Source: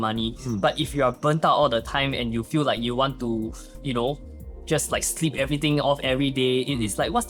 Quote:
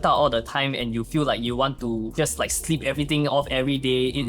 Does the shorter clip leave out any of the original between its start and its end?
yes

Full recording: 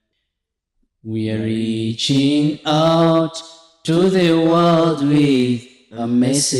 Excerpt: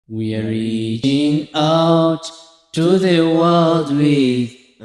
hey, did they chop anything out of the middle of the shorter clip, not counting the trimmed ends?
yes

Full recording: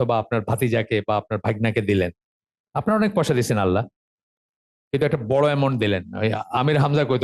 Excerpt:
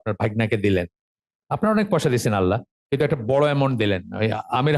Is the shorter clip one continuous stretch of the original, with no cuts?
no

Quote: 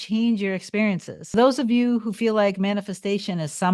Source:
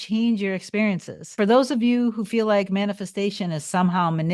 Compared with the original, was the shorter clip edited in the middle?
yes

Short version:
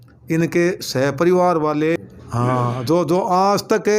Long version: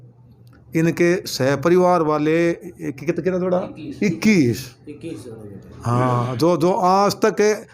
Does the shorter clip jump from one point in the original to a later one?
yes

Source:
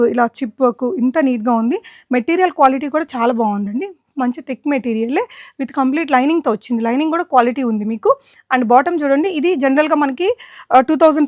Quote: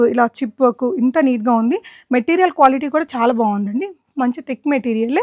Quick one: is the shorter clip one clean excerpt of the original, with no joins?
yes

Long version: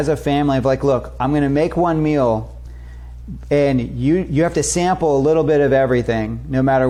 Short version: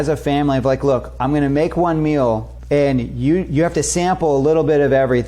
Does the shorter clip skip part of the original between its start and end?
yes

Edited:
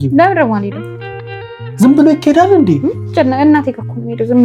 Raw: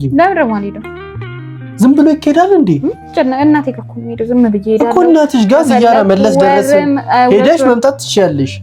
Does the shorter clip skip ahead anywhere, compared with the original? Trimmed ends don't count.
no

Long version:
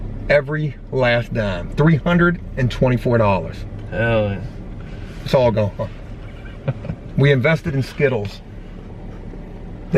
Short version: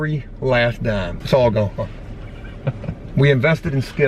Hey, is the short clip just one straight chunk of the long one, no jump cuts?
no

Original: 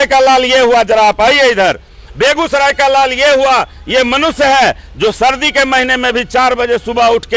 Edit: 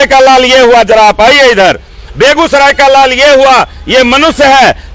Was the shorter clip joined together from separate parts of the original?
no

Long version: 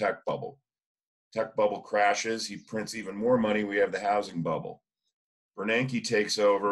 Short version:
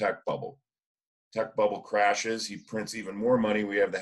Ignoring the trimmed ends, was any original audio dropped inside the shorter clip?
no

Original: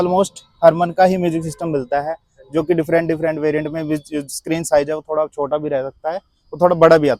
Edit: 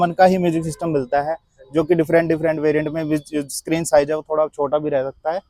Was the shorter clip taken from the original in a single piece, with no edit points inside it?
yes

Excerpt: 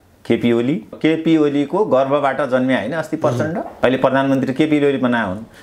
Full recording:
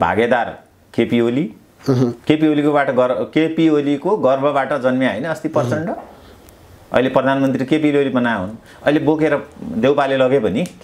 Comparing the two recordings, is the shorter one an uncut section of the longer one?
no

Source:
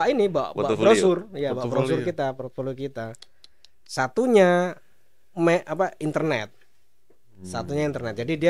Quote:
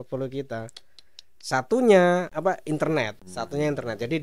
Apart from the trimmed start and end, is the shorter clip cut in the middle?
yes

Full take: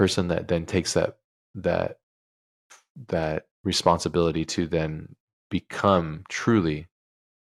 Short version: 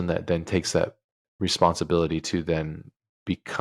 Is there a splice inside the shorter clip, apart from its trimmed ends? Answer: yes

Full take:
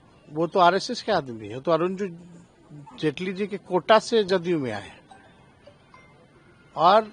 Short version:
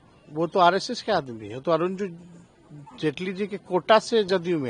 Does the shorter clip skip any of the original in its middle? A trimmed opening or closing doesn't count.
no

